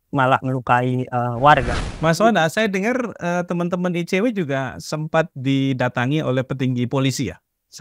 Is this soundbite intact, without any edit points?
no; 1 cut; at 1.8 s

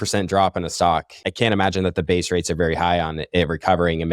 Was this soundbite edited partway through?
yes; 1 cut; at 1.2 s

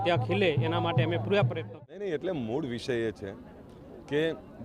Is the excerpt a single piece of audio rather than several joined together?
no; 1 cut; at 1.7 s

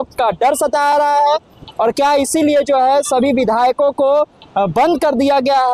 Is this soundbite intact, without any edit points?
yes; 0 cuts

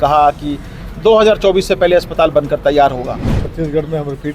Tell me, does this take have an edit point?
yes; 1 cut; at 3.4 s

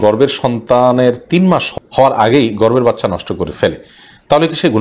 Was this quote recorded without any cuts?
no; 1 cut; at 1.7 s

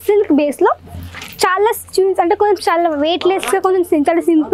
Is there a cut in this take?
no; 0 cuts

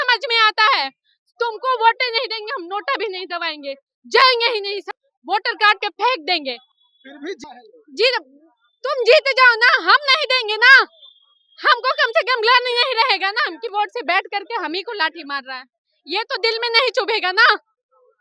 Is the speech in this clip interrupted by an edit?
no; 0 cuts

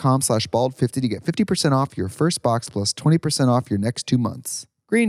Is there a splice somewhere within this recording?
no; 0 cuts

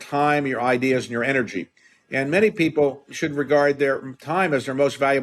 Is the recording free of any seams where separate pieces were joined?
no; 1 cut; at 3.1 s

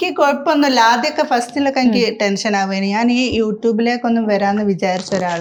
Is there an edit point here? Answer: no; 0 cuts

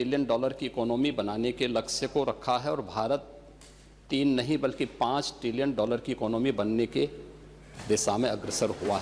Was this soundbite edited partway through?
no; 0 cuts

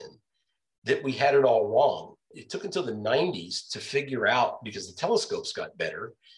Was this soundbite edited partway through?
yes; 1 cut; at 2.3 s

